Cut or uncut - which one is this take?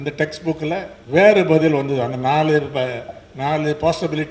cut